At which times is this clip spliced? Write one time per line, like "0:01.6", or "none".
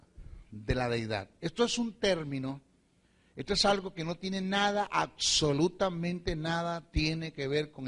none